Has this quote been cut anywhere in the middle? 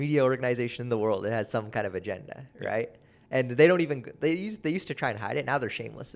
no; 0 cuts

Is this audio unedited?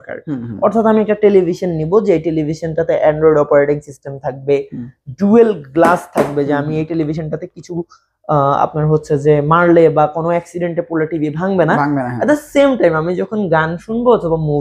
yes; 0 cuts

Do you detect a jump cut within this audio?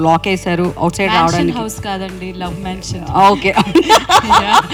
no; 0 cuts

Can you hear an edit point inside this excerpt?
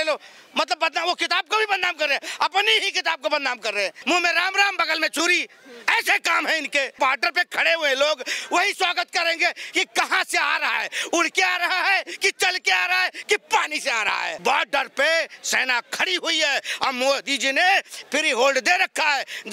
yes; 3 cuts; at 4.0 s, 6.9 s, 14.3 s

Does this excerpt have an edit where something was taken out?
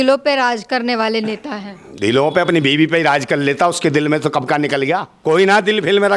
yes; 1 cut; at 5.1 s

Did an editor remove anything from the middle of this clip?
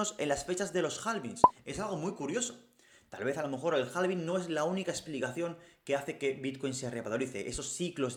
no; 0 cuts

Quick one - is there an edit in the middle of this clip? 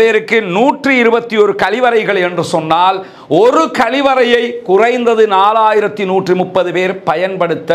no; 0 cuts

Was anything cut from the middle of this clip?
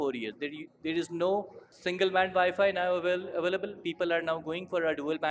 yes; 1 cut; at 1.6 s

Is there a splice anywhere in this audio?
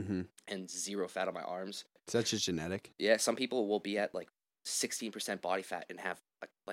yes; 1 cut; at 2.0 s

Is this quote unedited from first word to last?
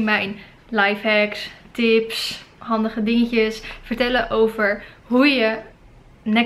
yes; 0 cuts

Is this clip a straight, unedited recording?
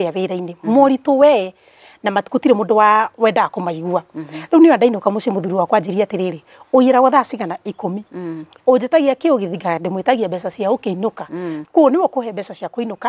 no; 1 cut; at 11.5 s

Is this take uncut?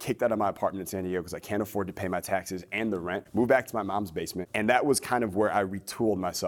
no; 2 cuts; at 3.2 s, 4.4 s

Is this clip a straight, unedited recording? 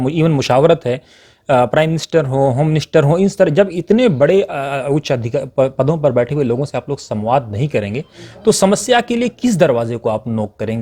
yes; 0 cuts

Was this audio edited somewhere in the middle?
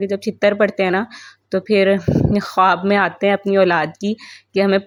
no; 0 cuts

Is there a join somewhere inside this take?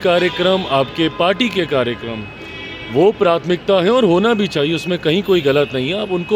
no; 0 cuts

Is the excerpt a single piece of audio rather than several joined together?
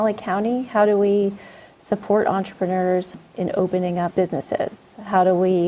no; 1 cut; at 4.1 s

